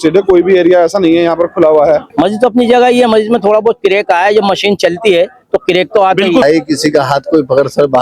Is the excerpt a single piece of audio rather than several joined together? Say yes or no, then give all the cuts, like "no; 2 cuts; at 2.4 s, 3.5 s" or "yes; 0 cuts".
no; 2 cuts; at 2.1 s, 6.4 s